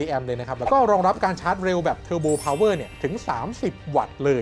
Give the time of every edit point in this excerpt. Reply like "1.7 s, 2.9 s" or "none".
none